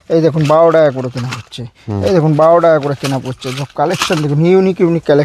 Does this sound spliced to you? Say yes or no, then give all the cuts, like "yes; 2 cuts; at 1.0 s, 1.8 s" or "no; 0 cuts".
no; 0 cuts